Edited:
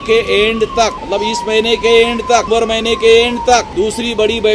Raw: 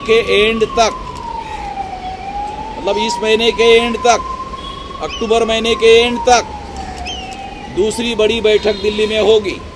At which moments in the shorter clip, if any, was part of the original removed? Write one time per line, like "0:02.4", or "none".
0:01.0
0:02.5
0:03.7